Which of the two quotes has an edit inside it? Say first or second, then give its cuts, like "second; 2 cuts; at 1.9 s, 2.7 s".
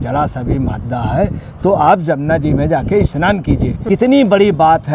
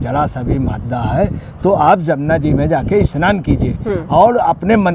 first; 1 cut; at 3.8 s